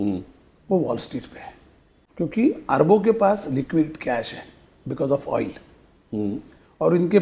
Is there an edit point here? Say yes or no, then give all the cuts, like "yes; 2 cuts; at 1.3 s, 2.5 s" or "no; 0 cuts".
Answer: yes; 1 cut; at 2.0 s